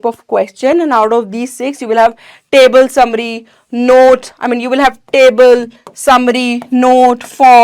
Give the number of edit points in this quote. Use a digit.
0